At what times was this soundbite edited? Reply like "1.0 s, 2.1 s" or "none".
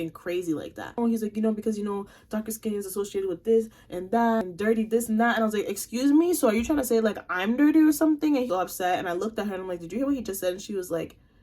4.4 s, 8.5 s